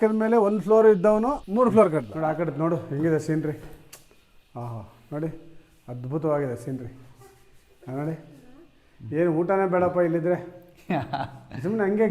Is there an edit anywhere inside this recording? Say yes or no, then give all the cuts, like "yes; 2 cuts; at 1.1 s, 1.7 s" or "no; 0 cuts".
yes; 2 cuts; at 1.4 s, 2.1 s